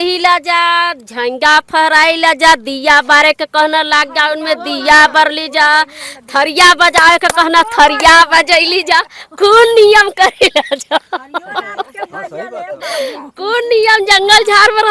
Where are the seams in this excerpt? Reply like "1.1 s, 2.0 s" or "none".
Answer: none